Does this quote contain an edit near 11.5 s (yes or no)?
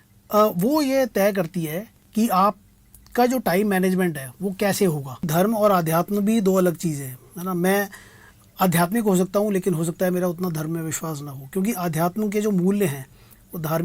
no